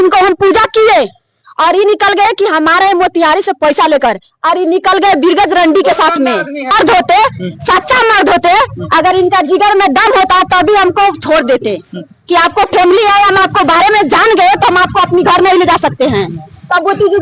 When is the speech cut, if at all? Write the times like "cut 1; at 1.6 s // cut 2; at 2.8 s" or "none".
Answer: cut 1; at 6.7 s